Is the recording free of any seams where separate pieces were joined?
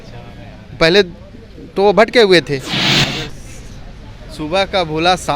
no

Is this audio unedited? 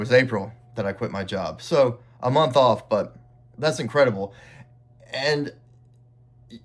yes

